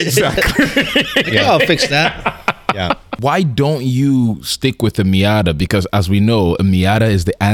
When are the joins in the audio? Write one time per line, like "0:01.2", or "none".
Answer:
0:03.1